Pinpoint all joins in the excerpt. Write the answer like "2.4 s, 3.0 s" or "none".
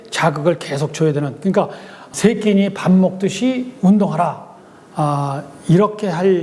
none